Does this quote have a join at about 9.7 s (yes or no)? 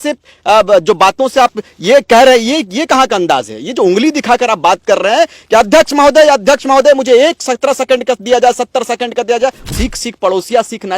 yes